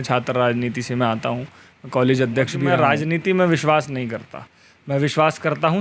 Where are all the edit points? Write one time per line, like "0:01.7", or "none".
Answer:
0:02.7